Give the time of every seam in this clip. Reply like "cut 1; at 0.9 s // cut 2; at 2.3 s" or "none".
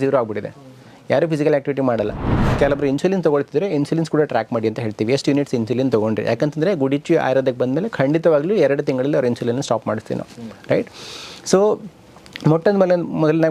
cut 1; at 2.5 s